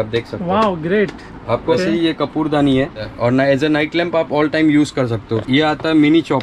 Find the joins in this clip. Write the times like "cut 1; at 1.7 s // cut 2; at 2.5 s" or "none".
cut 1; at 1.7 s // cut 2; at 3.0 s // cut 3; at 5.4 s